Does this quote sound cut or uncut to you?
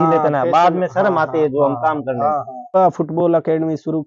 cut